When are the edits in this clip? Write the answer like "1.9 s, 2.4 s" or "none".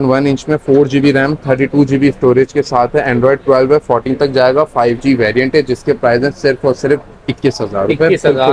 none